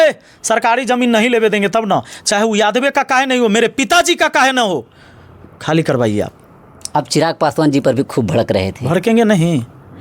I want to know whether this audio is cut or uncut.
uncut